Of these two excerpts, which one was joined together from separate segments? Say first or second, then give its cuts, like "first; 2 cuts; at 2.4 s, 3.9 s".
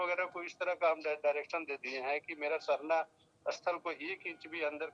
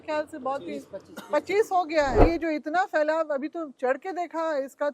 second; 1 cut; at 2.2 s